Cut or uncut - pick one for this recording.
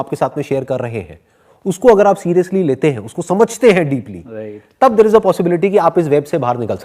uncut